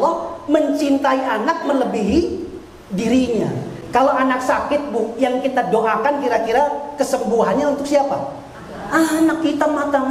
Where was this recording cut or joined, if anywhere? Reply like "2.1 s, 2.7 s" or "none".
none